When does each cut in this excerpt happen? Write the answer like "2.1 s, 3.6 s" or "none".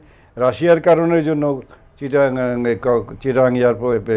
none